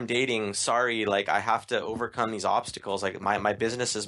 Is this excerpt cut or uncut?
uncut